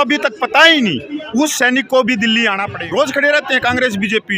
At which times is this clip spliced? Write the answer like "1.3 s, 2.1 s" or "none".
2.8 s

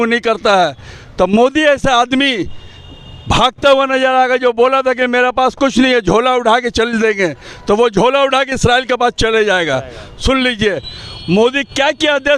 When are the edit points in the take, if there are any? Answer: none

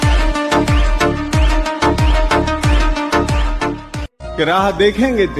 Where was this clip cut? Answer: 4.0 s

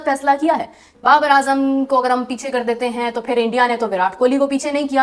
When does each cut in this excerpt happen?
1.0 s

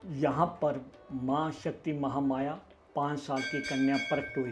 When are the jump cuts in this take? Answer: none

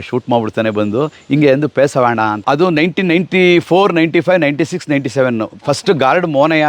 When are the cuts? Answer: 2.4 s

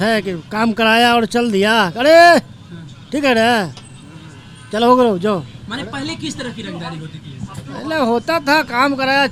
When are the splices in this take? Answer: none

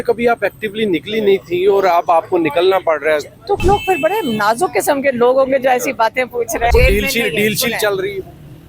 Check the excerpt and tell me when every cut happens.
3.6 s, 6.7 s

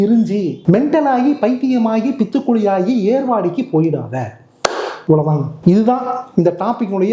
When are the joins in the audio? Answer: none

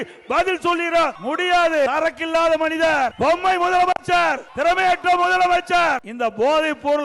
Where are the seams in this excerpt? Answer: 1.2 s, 1.9 s, 3.1 s, 4.5 s, 6.1 s

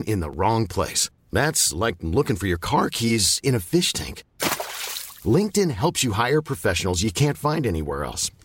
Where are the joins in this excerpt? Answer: none

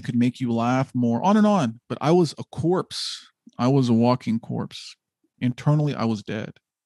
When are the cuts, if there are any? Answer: 5.3 s

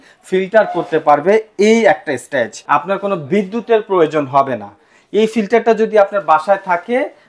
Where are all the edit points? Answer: 2.6 s

